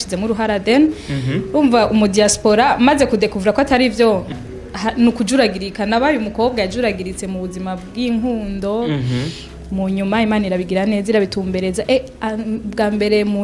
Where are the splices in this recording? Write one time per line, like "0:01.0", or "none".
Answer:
0:04.4

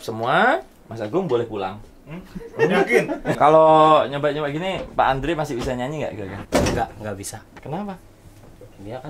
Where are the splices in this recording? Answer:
0:03.3
0:07.5

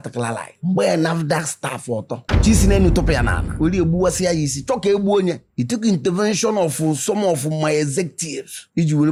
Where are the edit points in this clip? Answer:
none

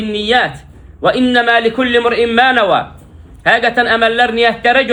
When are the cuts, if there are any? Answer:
none

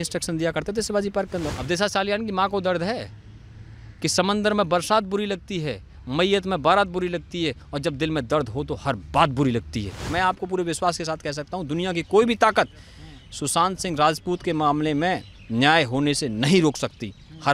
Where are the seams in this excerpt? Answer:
0:01.4
0:10.1

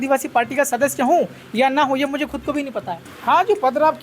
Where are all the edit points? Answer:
0:03.0

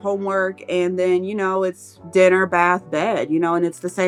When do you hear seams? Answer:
none

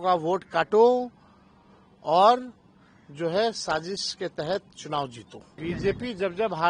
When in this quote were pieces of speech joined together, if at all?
0:05.4

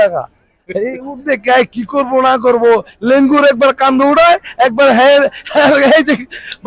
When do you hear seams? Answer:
none

